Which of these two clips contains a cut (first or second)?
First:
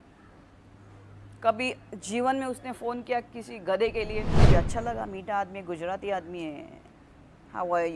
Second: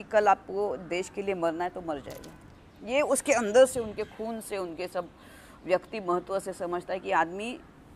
first